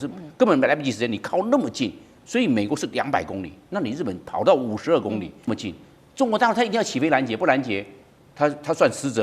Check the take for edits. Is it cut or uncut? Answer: cut